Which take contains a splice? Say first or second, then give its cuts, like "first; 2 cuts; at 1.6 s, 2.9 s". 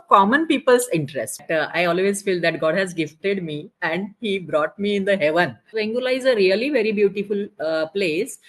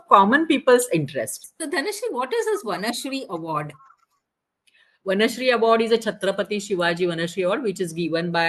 first; 2 cuts; at 1.4 s, 5.6 s